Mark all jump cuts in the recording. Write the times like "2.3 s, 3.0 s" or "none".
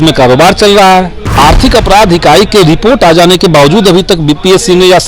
1.2 s

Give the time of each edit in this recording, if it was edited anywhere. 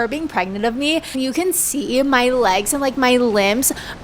1.1 s

